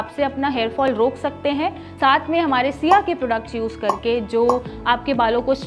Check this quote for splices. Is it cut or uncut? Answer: cut